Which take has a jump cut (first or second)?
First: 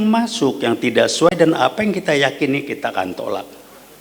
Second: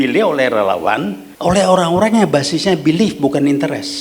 second